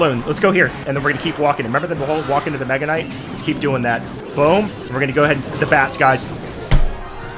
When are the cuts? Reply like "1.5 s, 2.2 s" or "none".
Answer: 0.8 s, 4.1 s

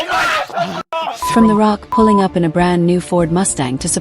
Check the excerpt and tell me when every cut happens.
1.2 s

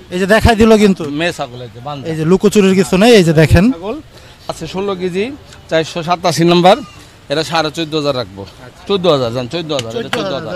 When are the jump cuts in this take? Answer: 4.6 s

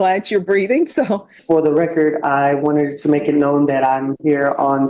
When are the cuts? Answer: 1.3 s

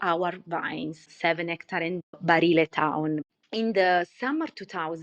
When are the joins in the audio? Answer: 1.0 s, 2.1 s, 3.3 s

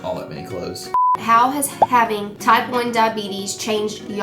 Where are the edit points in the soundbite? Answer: 1.0 s

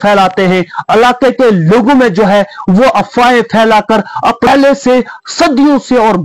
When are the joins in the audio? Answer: 4.5 s

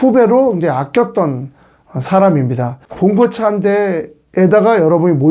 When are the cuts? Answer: 2.8 s

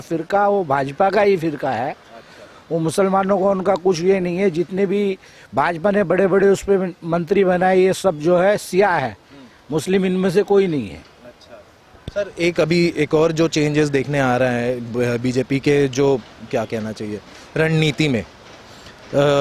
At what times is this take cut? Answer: none

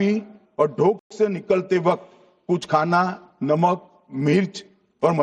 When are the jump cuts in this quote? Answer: none

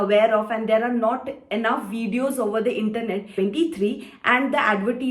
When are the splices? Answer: 3.3 s

